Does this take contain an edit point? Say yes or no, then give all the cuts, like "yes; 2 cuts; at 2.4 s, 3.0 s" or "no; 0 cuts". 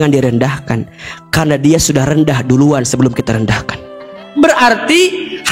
no; 0 cuts